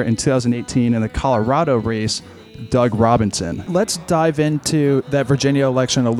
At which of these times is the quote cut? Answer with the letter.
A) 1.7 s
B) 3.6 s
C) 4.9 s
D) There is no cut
B